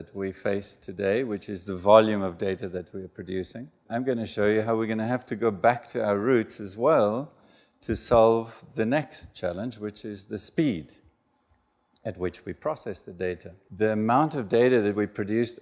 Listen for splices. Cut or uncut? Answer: cut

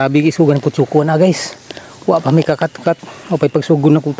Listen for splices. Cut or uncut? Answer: uncut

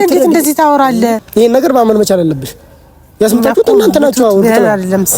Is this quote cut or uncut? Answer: cut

